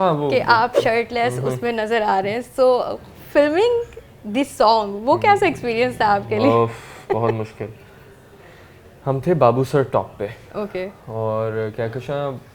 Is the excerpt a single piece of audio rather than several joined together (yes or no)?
yes